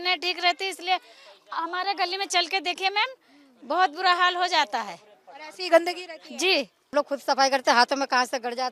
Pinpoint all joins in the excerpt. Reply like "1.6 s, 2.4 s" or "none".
6.9 s